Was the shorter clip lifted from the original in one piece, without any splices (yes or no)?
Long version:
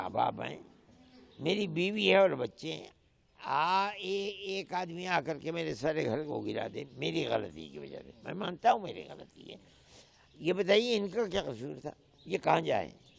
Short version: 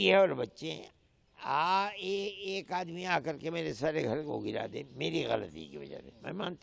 yes